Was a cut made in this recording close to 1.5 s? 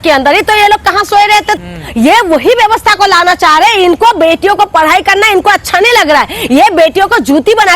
yes; 1 cut; at 1.5 s

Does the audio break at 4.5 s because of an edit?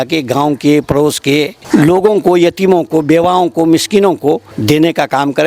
yes; 2 cuts; at 1.6 s, 4.5 s

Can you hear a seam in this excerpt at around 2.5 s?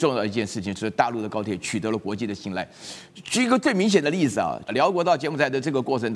no; 1 cut; at 4.6 s

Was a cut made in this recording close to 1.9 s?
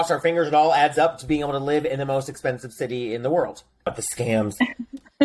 no; 1 cut; at 4.0 s

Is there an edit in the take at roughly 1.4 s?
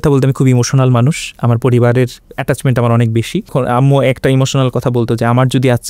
no; 1 cut; at 3.5 s

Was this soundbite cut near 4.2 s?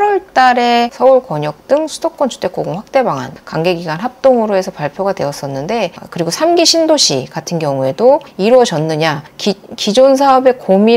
no; 1 cut; at 6.0 s

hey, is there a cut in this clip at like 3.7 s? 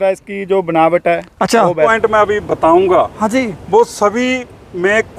no; 1 cut; at 1.9 s

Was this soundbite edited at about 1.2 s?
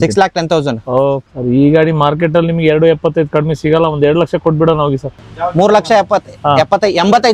yes; 2 cuts; at 1.2 s, 5.2 s

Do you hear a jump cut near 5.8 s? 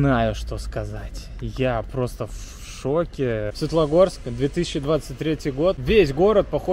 yes; 2 cuts; at 3.6 s, 5.8 s

